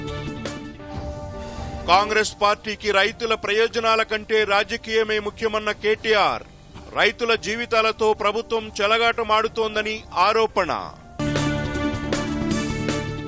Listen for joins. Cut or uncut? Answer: cut